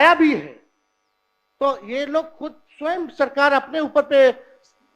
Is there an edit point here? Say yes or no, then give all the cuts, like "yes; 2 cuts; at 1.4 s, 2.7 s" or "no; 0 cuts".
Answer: no; 0 cuts